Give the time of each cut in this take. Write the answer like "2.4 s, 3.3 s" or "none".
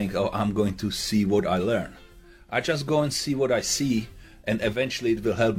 none